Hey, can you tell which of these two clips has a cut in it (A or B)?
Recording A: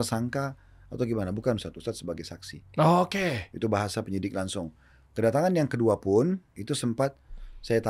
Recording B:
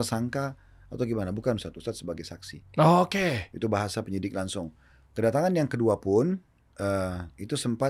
A